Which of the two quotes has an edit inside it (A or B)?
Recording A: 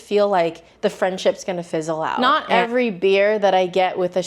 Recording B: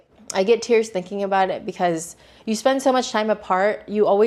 A